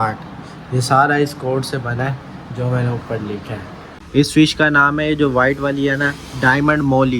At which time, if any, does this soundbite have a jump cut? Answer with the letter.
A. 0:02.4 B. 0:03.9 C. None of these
B